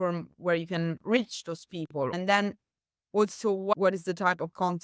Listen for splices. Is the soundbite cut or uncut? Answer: cut